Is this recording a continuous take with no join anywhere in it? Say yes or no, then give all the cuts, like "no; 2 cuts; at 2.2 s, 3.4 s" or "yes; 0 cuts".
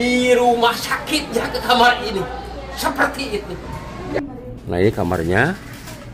no; 1 cut; at 4.3 s